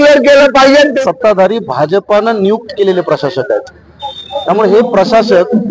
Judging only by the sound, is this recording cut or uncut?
cut